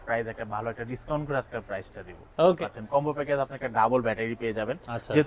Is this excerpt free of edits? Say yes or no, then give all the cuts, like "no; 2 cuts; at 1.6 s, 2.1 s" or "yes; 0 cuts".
no; 1 cut; at 2.6 s